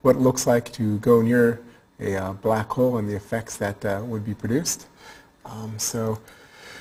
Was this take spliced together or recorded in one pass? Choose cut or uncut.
uncut